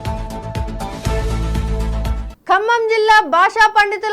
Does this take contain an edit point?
yes; 1 cut; at 2.2 s

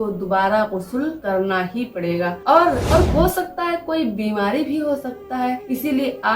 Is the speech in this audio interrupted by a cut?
yes; 1 cut; at 2.8 s

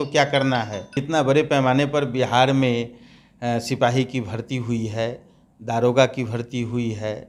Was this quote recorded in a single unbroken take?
no; 1 cut; at 1.0 s

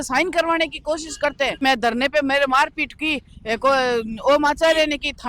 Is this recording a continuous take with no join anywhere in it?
no; 1 cut; at 1.6 s

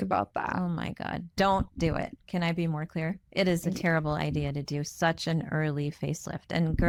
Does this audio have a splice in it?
no; 0 cuts

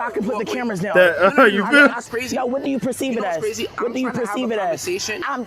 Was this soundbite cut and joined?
yes; 1 cut; at 2.0 s

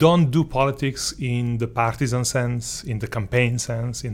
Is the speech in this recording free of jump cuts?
yes; 0 cuts

